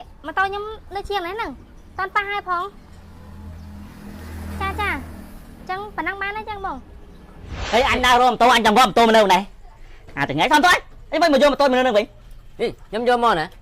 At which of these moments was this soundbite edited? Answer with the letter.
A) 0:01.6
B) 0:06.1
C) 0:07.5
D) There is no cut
C